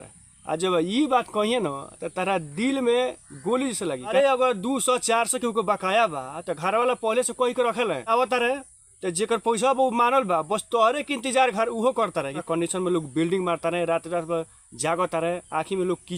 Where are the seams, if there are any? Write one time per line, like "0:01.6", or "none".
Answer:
0:04.1
0:08.1
0:12.4